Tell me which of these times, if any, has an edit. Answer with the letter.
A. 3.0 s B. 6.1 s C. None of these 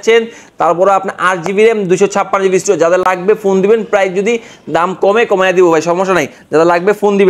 C